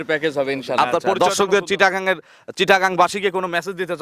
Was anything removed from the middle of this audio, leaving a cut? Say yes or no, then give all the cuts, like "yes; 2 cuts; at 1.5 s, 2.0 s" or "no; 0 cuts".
yes; 1 cut; at 1.1 s